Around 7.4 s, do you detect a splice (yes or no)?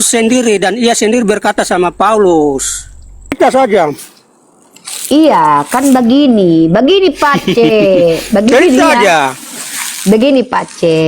no